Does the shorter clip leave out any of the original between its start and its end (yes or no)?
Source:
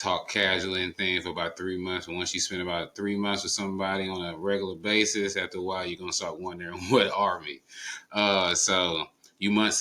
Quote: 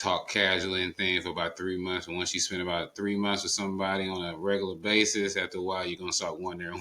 no